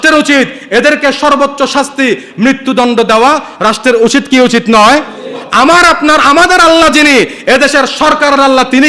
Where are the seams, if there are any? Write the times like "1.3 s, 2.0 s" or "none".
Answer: 5.4 s